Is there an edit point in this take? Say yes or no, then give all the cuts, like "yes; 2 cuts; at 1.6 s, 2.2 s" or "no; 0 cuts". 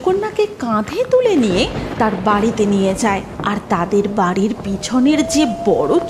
yes; 1 cut; at 3.4 s